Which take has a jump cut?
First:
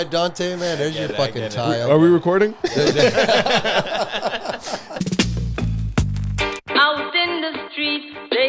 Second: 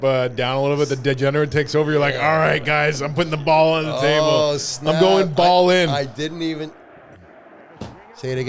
first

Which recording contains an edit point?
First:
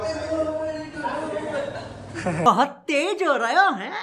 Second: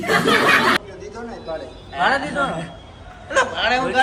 second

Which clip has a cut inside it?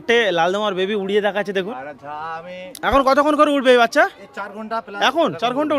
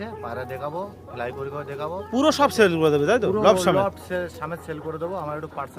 first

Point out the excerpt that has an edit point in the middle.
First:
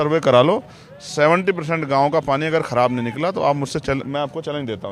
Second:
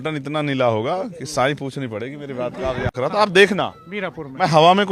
second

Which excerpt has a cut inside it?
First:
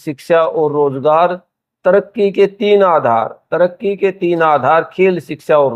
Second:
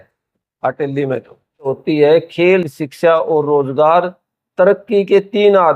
second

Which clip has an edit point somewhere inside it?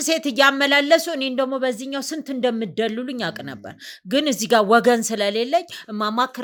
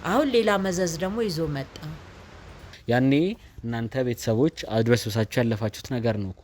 second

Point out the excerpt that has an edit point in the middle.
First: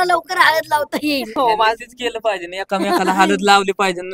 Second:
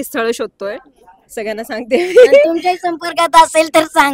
first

